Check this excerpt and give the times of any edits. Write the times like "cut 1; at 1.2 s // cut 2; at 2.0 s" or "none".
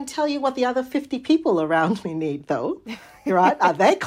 none